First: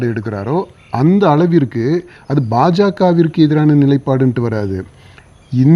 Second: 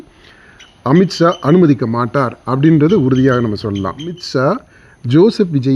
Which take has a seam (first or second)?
second